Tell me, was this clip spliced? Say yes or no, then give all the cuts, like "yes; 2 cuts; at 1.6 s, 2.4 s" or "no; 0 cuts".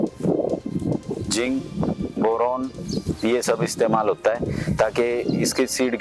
no; 0 cuts